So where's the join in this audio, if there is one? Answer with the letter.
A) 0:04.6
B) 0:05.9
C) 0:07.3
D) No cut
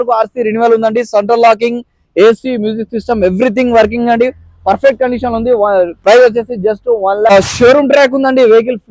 C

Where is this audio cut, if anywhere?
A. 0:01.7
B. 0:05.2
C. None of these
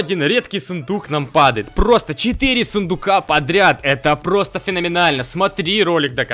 C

